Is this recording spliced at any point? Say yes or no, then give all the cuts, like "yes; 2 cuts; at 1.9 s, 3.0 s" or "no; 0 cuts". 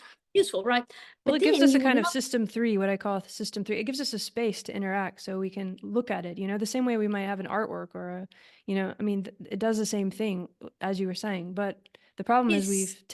no; 0 cuts